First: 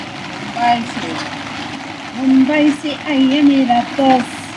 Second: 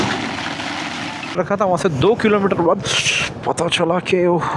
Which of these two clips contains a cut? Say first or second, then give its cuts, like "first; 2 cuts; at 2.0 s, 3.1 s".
second; 1 cut; at 1.4 s